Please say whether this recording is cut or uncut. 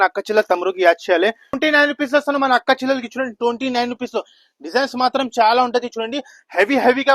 cut